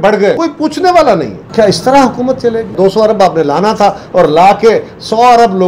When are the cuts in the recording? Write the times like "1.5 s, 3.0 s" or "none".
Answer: 1.3 s, 2.7 s